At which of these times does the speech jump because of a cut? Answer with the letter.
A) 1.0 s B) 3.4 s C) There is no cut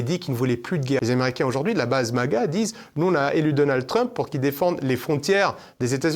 A